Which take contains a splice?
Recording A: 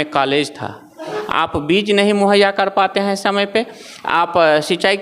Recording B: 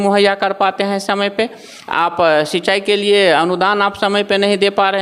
A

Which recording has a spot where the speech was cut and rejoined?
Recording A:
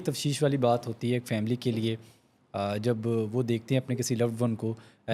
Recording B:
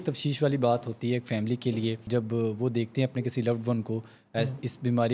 B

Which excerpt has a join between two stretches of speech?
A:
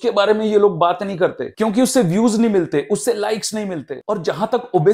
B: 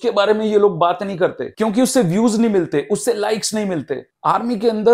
A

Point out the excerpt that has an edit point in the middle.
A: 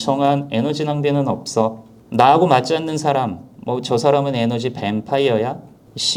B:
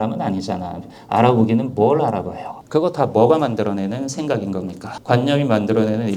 B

